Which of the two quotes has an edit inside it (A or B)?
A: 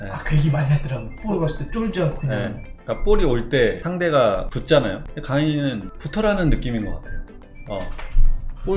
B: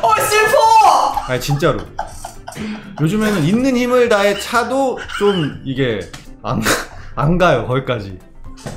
A